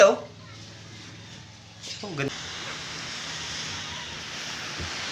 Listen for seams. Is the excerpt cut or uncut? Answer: cut